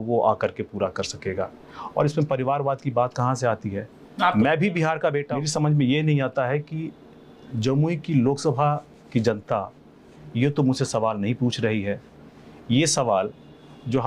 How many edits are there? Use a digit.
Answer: 1